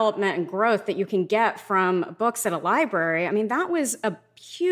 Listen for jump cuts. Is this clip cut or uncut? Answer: uncut